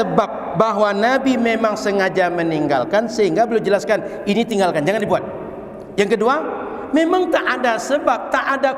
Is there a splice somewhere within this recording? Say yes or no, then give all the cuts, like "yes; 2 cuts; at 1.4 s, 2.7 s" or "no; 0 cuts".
no; 0 cuts